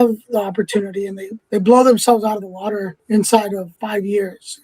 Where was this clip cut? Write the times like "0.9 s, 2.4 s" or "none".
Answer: 1.3 s, 2.9 s, 3.7 s